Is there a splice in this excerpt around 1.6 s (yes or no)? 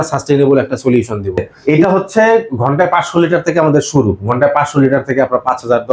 yes